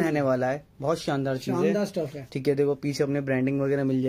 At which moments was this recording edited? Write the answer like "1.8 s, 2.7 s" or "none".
none